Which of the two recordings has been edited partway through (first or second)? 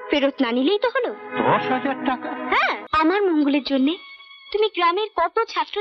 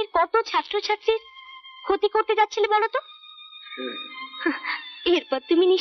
first